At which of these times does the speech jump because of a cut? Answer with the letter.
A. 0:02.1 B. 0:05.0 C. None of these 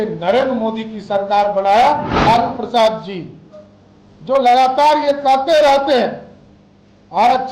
A